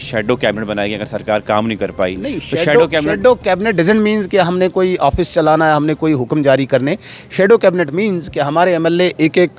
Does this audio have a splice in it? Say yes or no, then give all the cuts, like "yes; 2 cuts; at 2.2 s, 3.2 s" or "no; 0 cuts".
no; 0 cuts